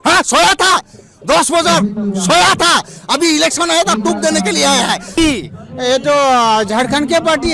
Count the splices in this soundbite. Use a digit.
1